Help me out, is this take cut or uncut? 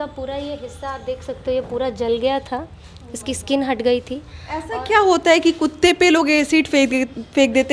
uncut